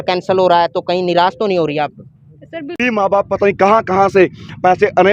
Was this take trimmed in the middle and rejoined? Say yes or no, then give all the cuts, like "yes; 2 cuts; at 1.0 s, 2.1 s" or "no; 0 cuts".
yes; 1 cut; at 2.8 s